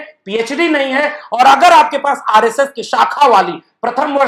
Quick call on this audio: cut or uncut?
uncut